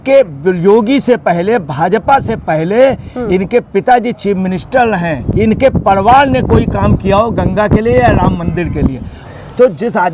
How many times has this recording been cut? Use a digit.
2